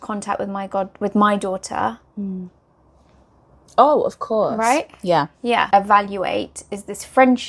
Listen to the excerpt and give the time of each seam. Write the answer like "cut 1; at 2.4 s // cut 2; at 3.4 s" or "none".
cut 1; at 5.7 s